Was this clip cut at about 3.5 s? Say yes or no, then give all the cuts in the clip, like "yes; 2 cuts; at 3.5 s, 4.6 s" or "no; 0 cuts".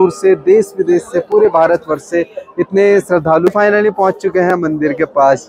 yes; 1 cut; at 3.5 s